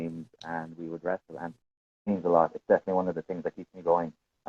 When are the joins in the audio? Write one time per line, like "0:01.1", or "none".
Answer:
0:01.7